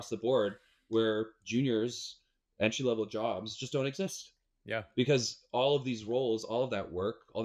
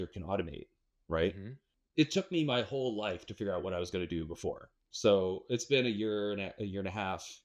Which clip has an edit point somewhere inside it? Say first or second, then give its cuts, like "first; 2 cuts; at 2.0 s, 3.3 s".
second; 2 cuts; at 1.5 s, 4.7 s